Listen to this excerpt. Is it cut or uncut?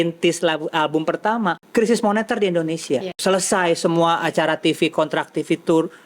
cut